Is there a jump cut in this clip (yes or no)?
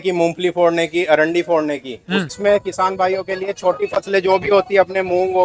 yes